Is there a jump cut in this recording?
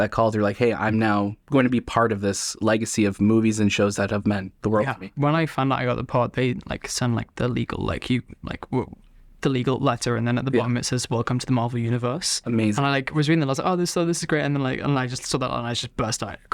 yes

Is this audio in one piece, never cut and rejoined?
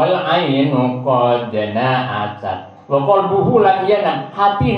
yes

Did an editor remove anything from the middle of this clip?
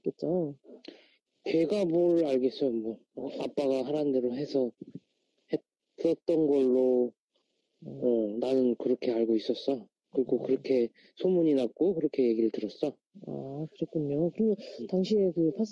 yes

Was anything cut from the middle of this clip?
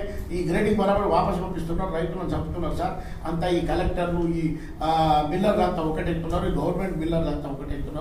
no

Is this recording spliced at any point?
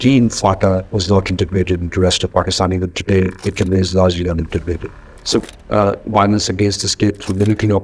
yes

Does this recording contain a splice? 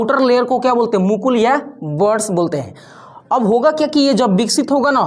no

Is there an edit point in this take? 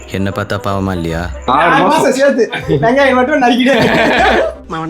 yes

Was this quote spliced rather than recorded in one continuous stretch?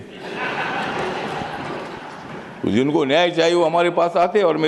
no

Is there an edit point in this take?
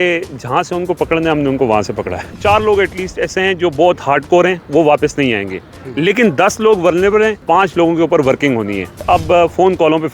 yes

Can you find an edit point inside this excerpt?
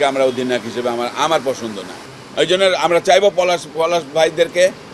yes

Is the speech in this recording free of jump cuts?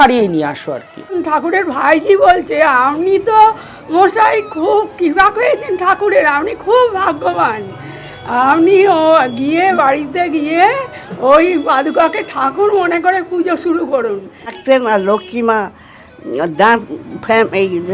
no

